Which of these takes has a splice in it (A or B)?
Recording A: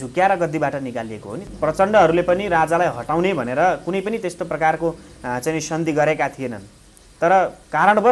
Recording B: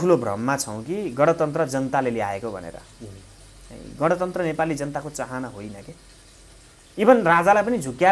A